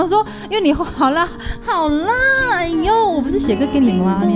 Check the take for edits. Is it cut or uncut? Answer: uncut